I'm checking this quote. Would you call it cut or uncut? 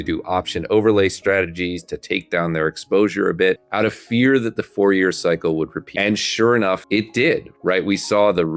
cut